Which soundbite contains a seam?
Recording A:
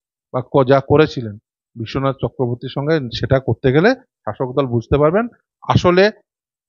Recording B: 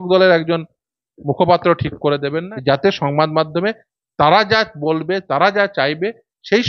B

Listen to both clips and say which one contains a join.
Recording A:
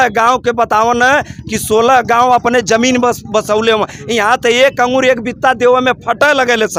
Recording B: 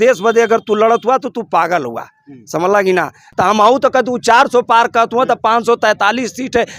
B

